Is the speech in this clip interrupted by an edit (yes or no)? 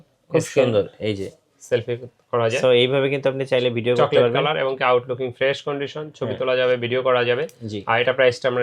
no